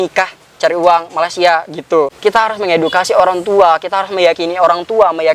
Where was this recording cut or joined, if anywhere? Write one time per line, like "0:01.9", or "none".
0:02.1